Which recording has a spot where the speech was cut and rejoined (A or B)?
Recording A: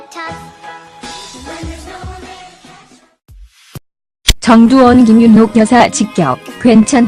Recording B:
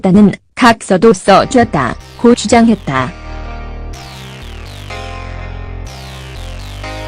B